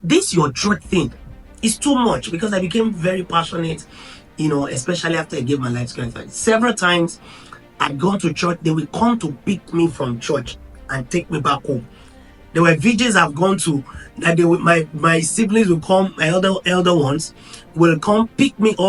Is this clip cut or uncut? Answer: uncut